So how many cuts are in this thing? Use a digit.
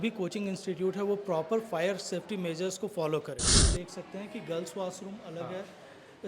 1